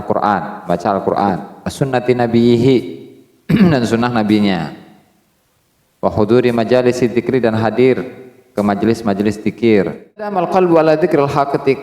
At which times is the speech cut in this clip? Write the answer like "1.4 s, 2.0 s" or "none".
10.3 s